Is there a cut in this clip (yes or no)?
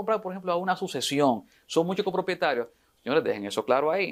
no